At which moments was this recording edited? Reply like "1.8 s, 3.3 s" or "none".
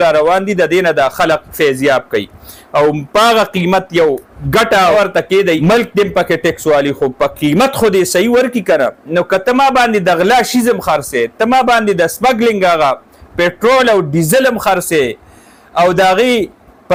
none

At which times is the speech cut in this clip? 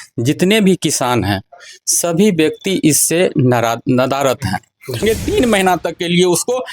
5.0 s

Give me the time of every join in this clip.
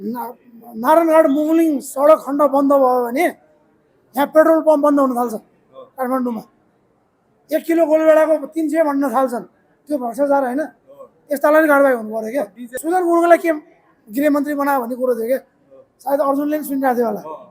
12.8 s

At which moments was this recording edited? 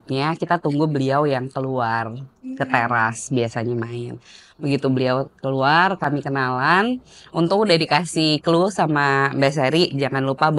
none

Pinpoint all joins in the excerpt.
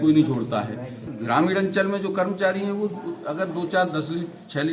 1.1 s

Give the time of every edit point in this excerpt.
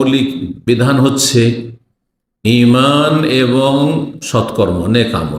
none

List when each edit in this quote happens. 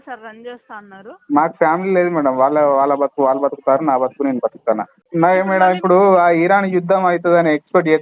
5.0 s

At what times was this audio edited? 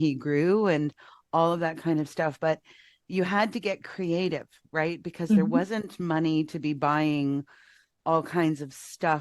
none

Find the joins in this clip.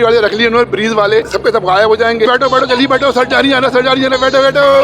1.2 s, 2.3 s

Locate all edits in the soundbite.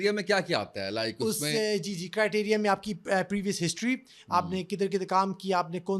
none

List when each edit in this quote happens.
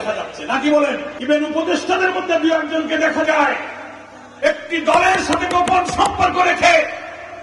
1.1 s

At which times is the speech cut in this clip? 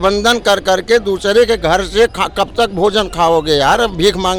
none

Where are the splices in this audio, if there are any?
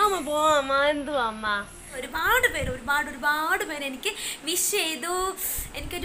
2.0 s

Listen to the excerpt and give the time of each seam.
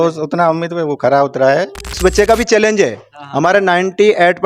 1.9 s

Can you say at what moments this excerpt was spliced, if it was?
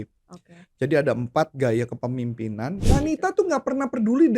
2.8 s

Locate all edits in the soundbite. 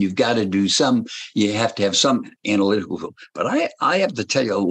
none

